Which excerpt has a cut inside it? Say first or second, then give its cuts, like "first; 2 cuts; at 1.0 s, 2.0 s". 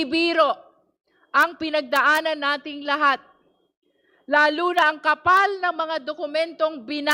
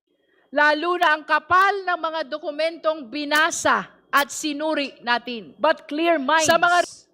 second; 1 cut; at 5.4 s